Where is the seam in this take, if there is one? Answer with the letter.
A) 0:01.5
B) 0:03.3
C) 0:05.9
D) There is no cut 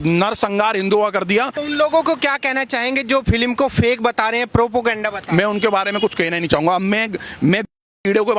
A